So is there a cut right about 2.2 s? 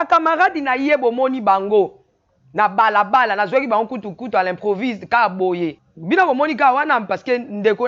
no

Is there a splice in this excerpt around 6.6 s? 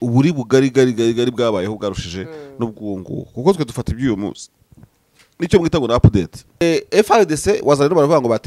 yes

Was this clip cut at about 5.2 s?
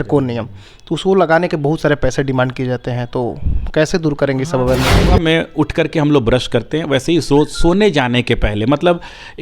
yes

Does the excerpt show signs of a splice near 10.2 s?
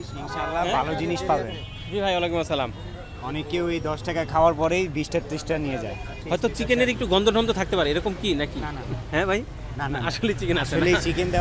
no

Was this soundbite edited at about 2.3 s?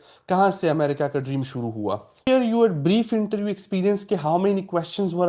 yes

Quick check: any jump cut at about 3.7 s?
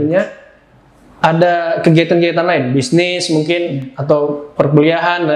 no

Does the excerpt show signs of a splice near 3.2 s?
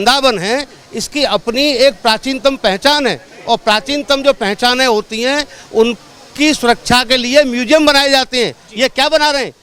no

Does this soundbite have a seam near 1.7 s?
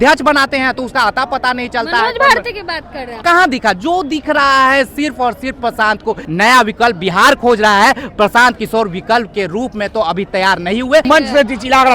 no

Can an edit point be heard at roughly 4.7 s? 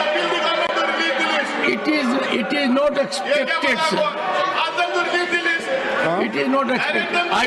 no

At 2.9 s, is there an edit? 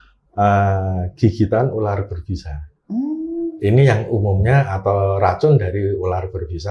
no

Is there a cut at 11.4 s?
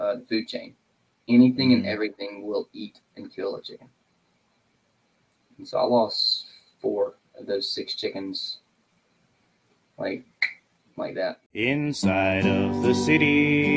yes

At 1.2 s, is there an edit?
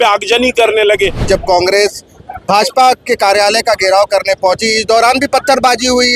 yes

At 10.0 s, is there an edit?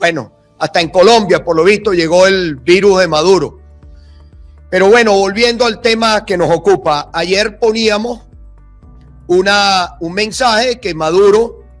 no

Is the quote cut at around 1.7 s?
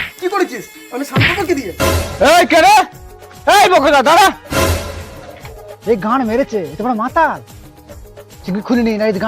yes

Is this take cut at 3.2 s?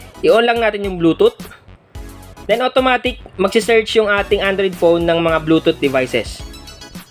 no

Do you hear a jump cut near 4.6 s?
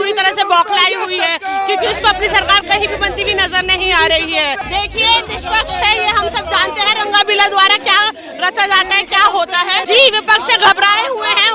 yes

